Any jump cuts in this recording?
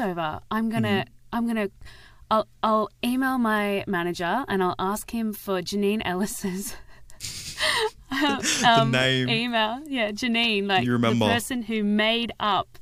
no; 0 cuts

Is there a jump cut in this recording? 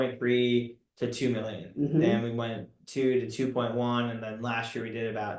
no; 0 cuts

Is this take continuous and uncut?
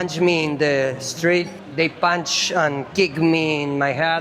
no; 1 cut; at 1.6 s

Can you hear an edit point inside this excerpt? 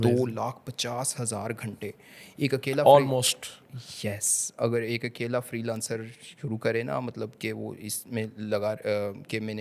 no; 0 cuts

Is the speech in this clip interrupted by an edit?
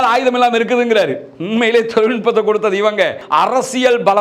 yes; 1 cut; at 3.2 s

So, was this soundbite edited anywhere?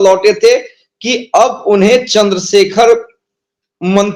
no; 0 cuts

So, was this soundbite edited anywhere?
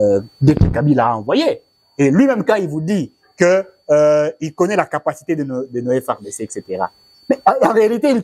no; 0 cuts

